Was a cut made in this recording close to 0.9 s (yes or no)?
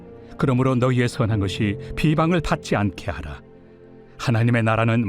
no